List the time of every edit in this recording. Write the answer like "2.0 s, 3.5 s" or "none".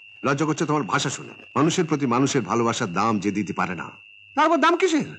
1.4 s